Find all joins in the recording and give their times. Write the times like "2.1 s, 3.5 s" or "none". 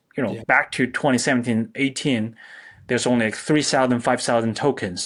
none